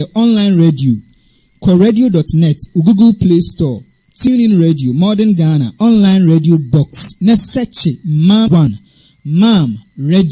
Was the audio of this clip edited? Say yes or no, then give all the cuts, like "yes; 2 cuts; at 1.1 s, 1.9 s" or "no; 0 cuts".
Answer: yes; 1 cut; at 8.6 s